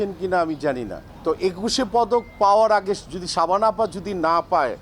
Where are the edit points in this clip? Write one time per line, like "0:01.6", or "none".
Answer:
none